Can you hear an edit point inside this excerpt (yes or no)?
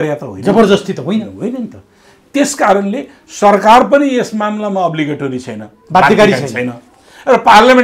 no